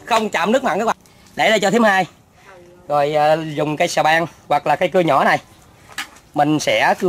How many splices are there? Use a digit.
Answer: 1